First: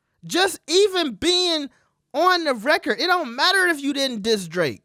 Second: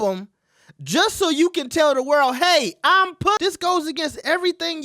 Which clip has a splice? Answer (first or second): second